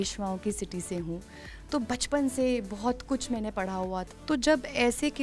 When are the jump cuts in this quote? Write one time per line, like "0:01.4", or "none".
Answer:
0:04.1